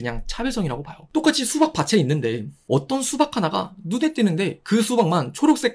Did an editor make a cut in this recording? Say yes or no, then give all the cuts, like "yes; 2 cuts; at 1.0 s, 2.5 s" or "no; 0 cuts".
yes; 1 cut; at 0.9 s